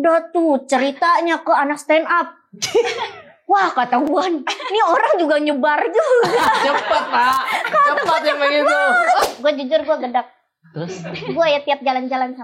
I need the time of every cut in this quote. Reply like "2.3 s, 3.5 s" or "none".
9.3 s